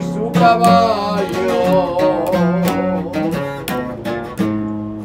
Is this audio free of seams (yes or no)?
yes